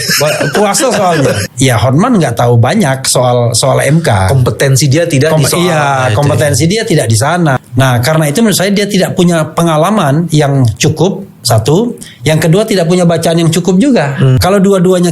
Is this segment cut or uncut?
cut